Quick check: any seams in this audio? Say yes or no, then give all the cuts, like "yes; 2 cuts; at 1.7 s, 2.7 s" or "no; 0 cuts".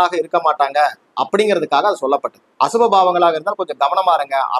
yes; 1 cut; at 2.4 s